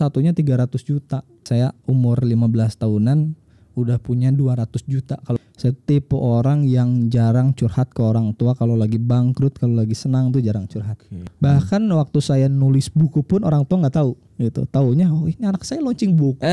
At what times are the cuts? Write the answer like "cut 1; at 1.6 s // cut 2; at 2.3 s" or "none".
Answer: cut 1; at 1.4 s // cut 2; at 5.4 s // cut 3; at 11.3 s // cut 4; at 14.2 s